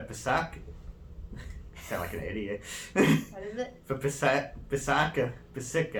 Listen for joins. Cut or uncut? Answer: uncut